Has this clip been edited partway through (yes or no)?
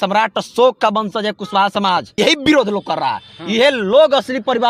yes